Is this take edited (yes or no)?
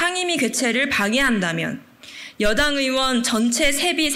no